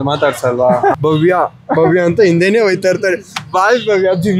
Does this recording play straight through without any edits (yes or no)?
no